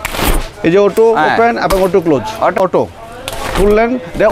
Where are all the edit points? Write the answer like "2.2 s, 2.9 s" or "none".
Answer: 2.6 s